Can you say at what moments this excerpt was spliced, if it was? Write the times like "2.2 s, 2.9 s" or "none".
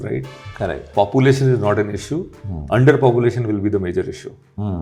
none

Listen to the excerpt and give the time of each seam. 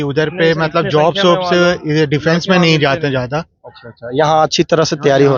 none

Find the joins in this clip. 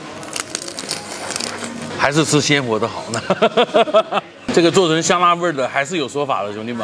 1.9 s, 4.3 s

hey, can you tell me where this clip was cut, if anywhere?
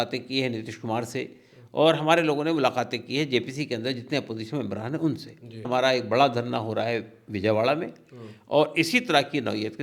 5.7 s

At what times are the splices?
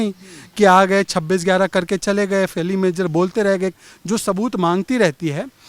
3.7 s

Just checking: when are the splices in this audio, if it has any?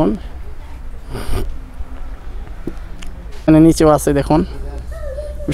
3.3 s

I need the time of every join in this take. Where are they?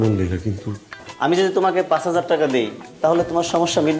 1.0 s

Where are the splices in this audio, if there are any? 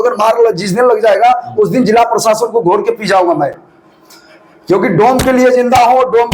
none

